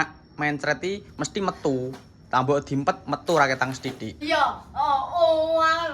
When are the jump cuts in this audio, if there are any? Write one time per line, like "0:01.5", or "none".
0:04.1

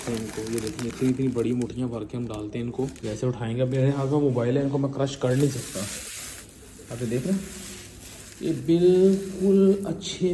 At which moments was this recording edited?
none

